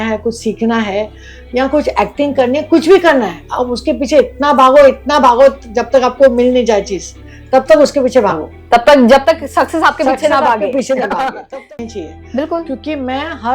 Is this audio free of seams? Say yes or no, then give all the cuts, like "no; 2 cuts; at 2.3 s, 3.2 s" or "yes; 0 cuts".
no; 1 cut; at 11.6 s